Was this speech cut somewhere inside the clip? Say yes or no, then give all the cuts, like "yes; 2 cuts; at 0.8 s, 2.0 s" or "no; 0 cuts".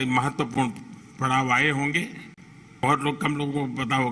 yes; 1 cut; at 2.8 s